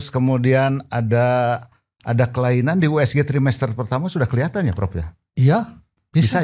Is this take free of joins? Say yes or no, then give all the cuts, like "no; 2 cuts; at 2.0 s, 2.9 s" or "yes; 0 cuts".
yes; 0 cuts